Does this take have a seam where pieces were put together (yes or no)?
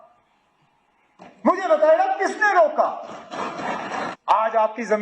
yes